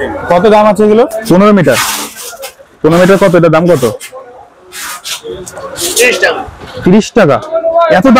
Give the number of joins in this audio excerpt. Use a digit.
1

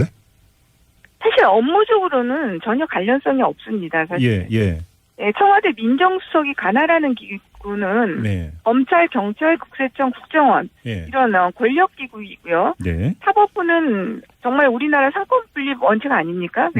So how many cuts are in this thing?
0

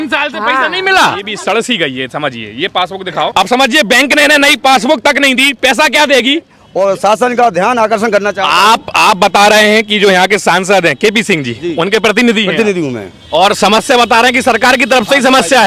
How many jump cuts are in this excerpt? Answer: 3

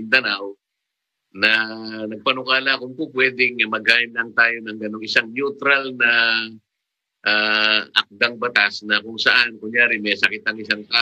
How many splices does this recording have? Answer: 1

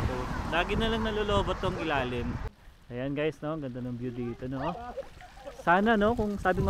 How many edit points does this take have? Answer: 1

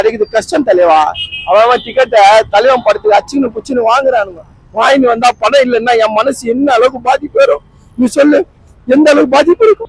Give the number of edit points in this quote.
0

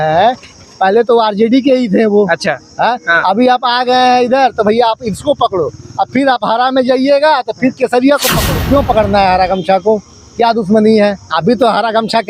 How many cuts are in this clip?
1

